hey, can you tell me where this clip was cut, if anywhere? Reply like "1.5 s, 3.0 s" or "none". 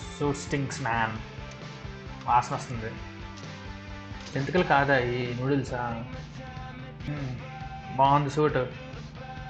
7.1 s